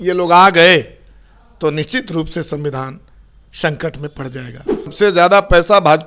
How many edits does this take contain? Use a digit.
1